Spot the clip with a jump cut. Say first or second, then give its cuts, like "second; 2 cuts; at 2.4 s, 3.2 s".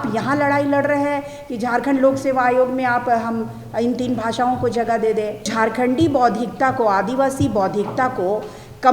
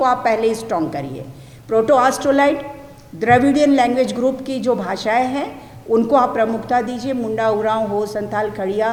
first; 1 cut; at 5.5 s